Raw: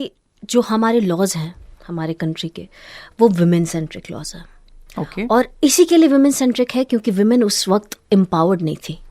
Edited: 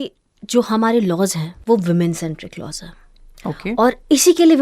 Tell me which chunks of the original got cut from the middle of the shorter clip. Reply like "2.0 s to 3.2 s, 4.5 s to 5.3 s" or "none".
1.5 s to 3.0 s